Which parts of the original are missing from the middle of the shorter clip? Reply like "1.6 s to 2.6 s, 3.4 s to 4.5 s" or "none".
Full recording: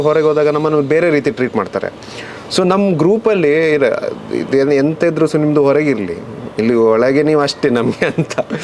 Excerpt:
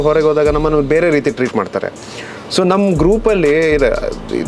none